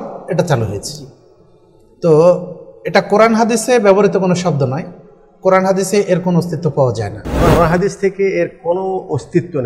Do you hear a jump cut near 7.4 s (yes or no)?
yes